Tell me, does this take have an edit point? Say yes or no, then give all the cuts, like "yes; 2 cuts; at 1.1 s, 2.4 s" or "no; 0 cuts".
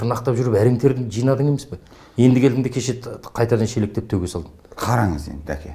no; 0 cuts